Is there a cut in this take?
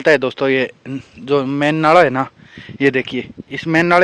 no; 0 cuts

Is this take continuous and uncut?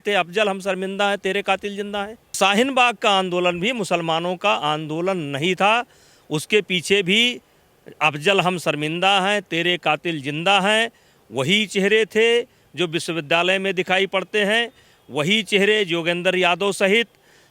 no; 1 cut; at 2.4 s

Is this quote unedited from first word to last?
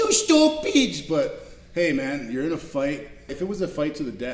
no; 1 cut; at 3.3 s

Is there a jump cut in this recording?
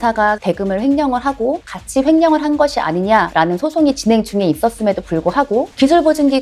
yes; 2 cuts; at 1.6 s, 3.3 s

